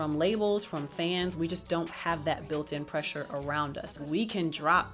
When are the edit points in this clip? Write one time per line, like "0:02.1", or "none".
0:04.0